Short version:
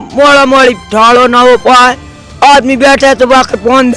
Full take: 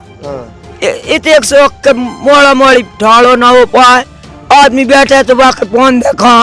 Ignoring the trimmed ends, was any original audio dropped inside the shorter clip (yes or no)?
no